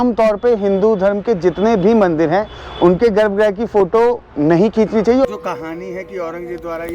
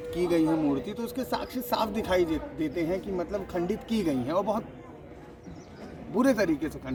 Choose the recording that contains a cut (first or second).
first